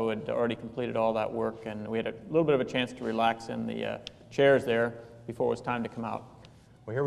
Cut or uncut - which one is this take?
cut